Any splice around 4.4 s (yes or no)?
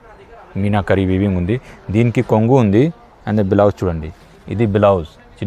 no